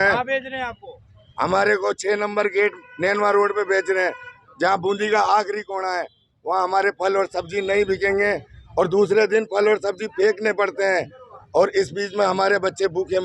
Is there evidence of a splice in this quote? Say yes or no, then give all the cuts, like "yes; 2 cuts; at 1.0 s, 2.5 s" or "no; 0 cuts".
no; 0 cuts